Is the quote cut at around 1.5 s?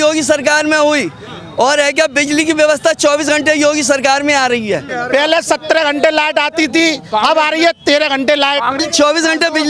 no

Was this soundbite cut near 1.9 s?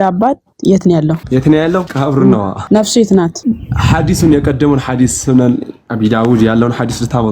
yes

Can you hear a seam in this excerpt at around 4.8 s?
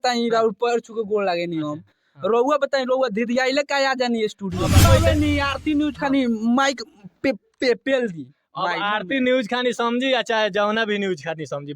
yes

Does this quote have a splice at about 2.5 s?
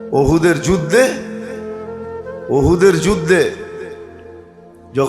yes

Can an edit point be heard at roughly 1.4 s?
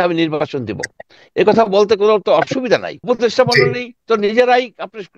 no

